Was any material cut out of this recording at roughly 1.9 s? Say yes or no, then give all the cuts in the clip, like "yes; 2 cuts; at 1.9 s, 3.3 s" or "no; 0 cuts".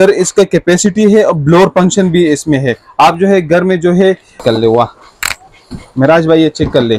no; 1 cut; at 4.3 s